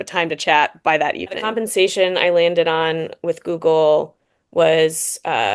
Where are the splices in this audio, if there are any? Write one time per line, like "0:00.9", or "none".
0:01.5